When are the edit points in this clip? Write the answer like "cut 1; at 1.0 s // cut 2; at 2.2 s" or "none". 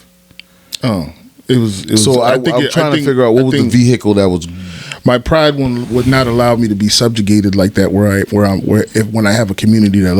none